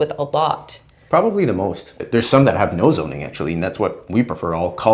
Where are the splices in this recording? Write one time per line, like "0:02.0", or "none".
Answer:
0:02.0